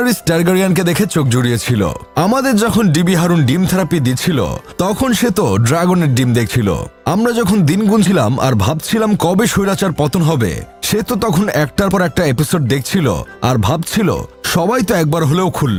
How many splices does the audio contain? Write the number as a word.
zero